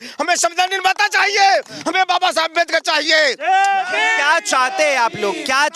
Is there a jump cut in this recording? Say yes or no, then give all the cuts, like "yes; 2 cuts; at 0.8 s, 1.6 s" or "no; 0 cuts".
no; 0 cuts